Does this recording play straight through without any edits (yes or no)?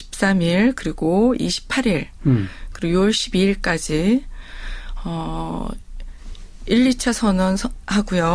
no